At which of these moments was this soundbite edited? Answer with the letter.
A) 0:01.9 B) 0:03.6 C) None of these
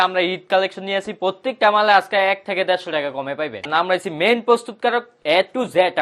B